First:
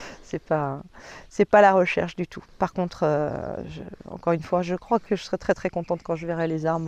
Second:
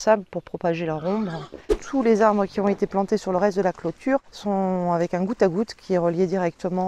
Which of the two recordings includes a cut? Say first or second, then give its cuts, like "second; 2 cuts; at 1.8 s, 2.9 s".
second; 2 cuts; at 1.8 s, 4.3 s